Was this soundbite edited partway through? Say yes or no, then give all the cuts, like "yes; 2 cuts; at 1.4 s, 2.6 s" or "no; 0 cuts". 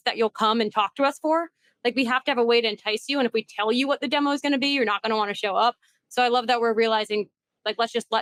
no; 0 cuts